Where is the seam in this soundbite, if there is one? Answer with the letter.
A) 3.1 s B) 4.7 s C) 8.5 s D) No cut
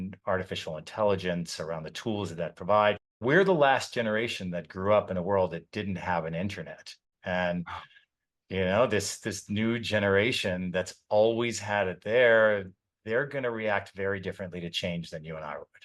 A